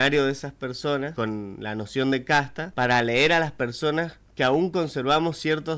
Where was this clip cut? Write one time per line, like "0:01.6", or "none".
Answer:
0:01.1
0:02.6